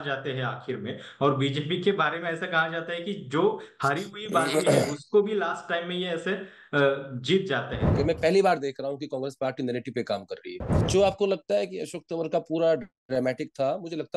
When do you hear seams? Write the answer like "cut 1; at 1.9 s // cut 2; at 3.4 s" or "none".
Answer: cut 1; at 7.8 s // cut 2; at 10.8 s